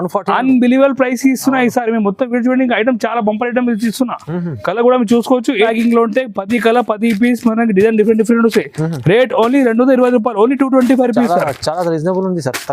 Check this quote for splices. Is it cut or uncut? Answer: cut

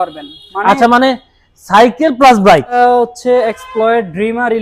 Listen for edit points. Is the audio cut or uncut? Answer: cut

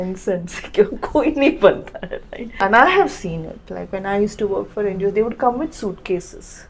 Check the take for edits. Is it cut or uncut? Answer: cut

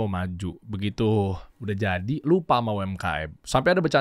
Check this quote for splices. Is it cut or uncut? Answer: cut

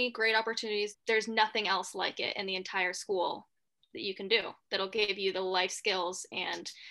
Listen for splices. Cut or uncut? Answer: cut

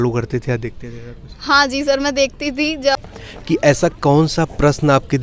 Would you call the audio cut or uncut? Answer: cut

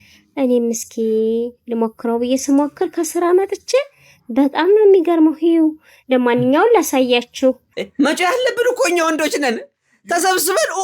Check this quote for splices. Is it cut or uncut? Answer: cut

